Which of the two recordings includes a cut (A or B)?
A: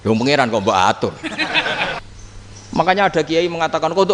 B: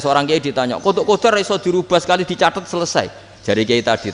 A